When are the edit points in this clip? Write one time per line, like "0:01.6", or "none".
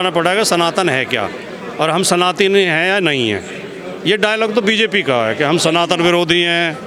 none